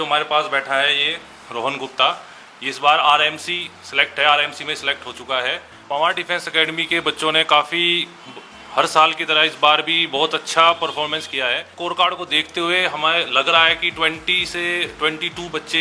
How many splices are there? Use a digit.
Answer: 2